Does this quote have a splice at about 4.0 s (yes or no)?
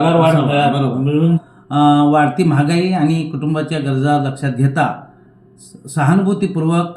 no